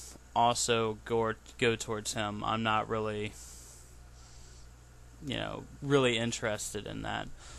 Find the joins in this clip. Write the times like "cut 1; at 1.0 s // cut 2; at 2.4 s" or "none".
cut 1; at 2.4 s